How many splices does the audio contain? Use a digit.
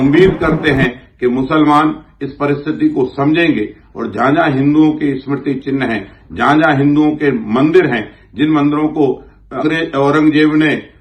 1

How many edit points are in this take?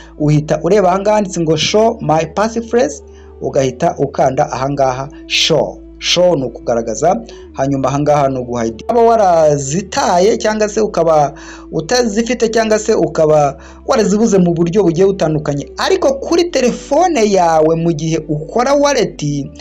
1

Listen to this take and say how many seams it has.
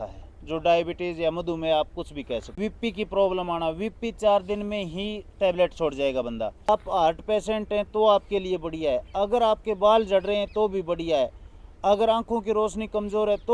2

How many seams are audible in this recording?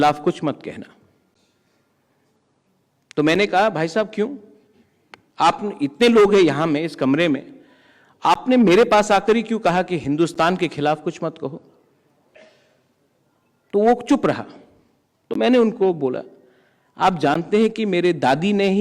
0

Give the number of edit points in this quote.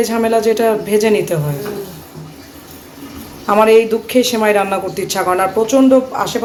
0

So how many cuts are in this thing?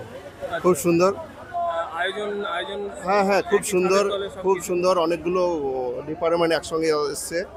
0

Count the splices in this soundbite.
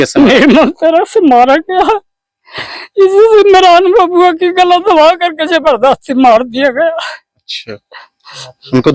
0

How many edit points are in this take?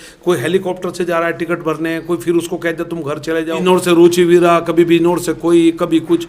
1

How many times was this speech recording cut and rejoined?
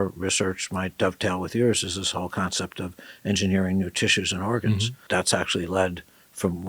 1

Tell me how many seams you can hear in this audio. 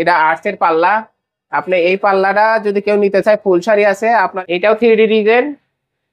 1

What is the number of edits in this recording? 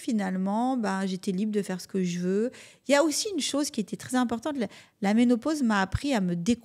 0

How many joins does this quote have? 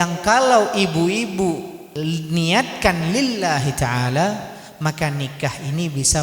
0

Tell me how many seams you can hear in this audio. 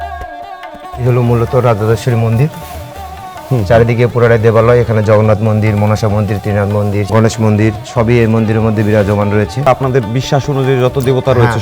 3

